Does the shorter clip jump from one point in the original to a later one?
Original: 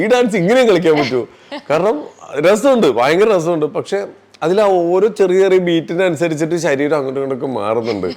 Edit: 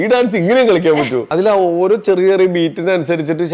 yes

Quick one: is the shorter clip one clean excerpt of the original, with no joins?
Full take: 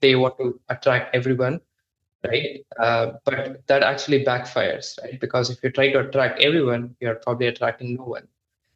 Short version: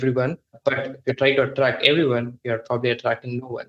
no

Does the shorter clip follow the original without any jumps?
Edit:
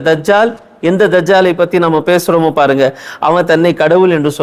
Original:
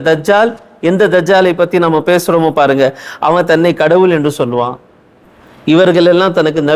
yes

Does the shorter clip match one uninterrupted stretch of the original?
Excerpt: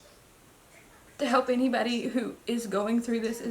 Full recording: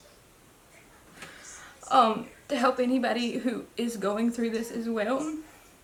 no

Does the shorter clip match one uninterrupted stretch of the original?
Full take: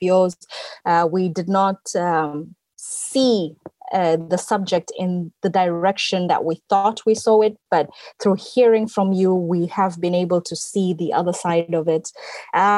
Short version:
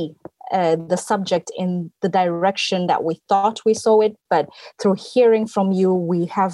yes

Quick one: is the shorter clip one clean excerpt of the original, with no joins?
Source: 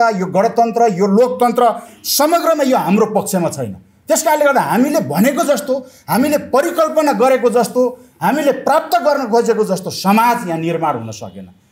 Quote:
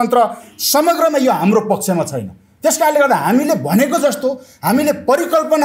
yes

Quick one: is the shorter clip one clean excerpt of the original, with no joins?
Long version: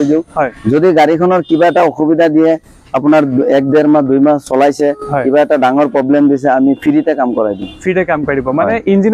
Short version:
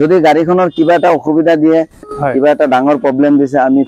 no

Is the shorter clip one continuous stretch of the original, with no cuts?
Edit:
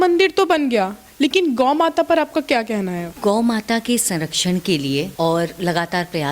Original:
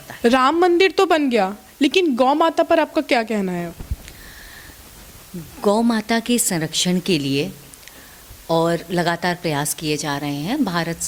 no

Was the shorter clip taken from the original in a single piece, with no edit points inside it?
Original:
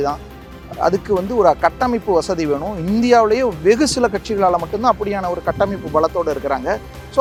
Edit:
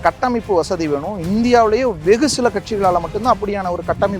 yes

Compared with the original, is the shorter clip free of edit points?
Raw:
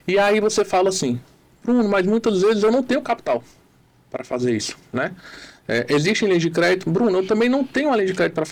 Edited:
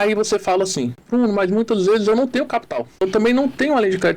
no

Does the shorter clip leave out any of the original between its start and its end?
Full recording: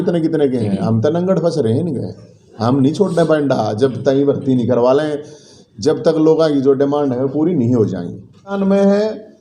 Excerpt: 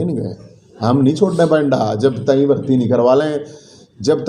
no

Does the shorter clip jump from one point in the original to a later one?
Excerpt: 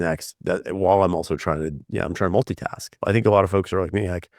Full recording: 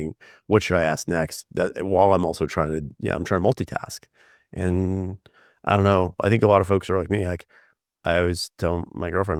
yes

